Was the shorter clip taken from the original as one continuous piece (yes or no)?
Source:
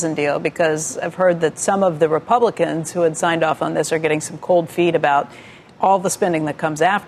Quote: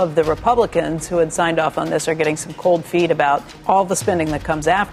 no